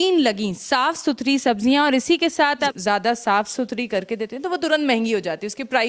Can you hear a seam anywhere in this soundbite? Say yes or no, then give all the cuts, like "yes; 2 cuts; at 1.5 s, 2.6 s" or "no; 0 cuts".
yes; 1 cut; at 2.7 s